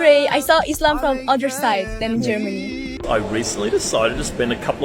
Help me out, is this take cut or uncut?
cut